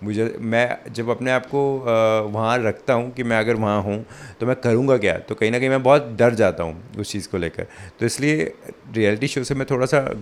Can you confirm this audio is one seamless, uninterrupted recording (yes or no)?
yes